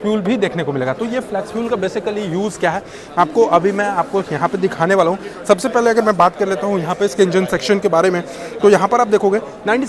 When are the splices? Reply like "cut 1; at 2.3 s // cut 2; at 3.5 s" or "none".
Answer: none